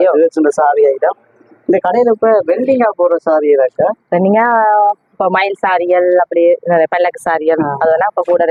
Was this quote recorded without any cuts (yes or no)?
yes